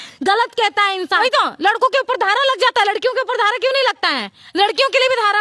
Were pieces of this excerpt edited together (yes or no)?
yes